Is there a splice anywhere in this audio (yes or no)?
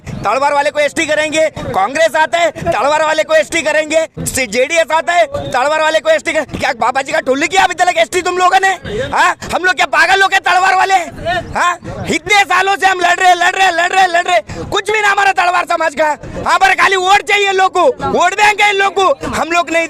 yes